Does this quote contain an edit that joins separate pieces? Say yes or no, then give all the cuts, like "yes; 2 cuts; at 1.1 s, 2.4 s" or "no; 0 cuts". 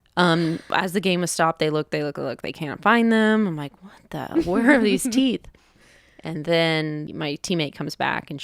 yes; 1 cut; at 7.1 s